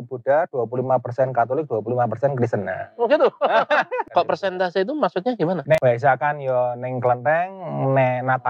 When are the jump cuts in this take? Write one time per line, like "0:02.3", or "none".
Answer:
0:04.0
0:05.7

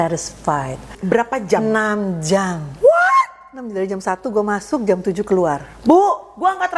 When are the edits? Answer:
0:00.9

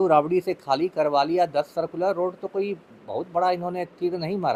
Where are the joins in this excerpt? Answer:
none

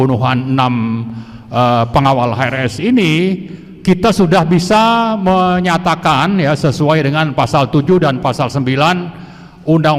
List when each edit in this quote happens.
none

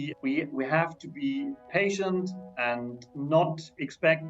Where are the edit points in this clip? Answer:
0:01.6

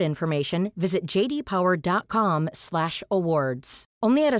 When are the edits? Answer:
none

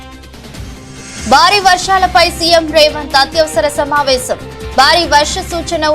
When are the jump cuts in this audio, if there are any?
0:01.2

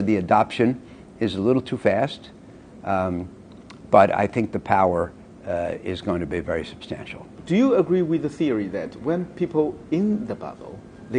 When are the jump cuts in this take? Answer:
none

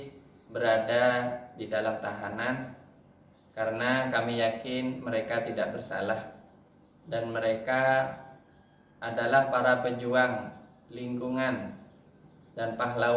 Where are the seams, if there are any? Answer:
none

